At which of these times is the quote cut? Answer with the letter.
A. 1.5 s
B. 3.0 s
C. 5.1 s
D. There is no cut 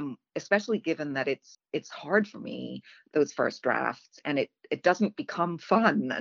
A